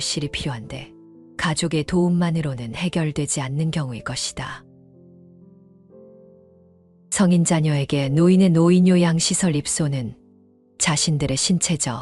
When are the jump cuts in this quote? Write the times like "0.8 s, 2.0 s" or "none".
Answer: 4.6 s, 7.1 s